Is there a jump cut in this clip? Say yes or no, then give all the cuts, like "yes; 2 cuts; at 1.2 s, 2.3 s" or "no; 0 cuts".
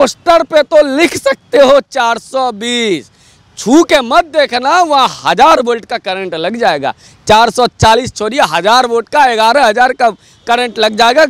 no; 0 cuts